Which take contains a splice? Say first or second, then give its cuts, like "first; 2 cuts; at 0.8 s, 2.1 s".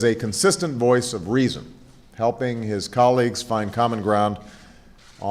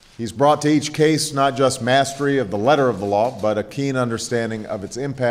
first; 1 cut; at 4.1 s